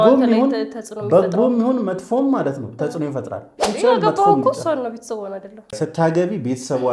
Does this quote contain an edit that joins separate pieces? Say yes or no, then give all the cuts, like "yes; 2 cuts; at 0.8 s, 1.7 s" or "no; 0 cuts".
yes; 2 cuts; at 3.6 s, 5.8 s